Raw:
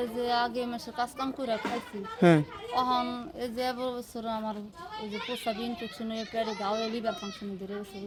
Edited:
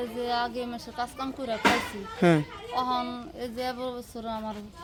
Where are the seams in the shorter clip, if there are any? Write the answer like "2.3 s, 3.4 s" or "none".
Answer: none